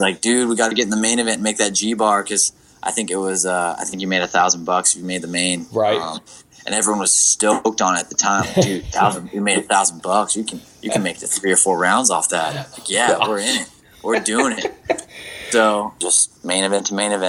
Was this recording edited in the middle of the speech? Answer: yes; 1 cut; at 16.1 s

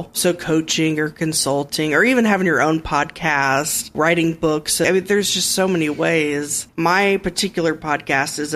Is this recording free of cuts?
no; 3 cuts; at 3.9 s, 4.9 s, 6.6 s

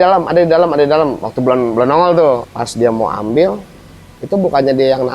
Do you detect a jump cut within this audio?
yes; 1 cut; at 2.4 s

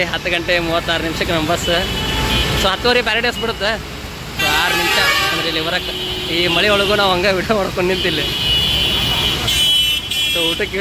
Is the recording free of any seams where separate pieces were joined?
yes; 0 cuts

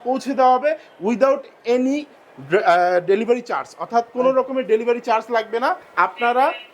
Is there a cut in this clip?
no; 0 cuts

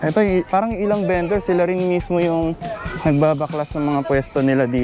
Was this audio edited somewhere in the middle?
no; 0 cuts

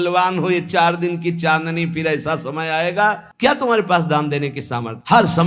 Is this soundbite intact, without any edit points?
no; 1 cut; at 3.3 s

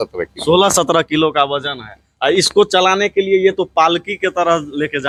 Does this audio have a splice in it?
no; 0 cuts

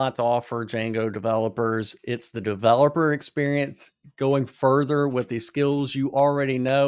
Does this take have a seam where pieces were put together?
no; 0 cuts

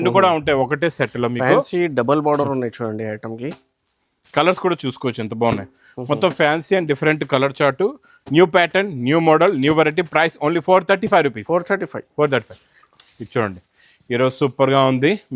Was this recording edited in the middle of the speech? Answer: yes; 1 cut; at 12.8 s

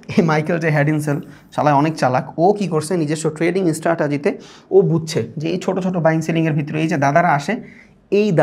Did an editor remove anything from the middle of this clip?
no; 0 cuts

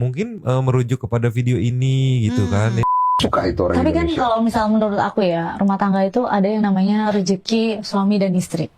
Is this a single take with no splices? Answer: no; 1 cut; at 3.0 s

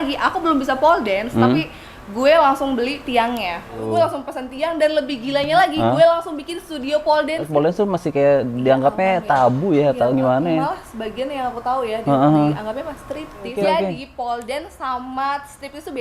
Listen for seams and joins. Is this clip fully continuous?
no; 3 cuts; at 3.8 s, 7.5 s, 13.4 s

